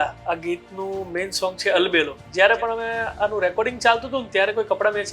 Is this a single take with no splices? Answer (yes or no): no